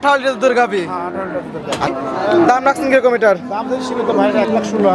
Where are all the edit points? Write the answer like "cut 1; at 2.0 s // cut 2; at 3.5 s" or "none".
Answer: cut 1; at 1.9 s